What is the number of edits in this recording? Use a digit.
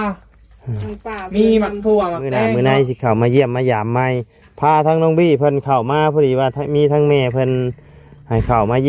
1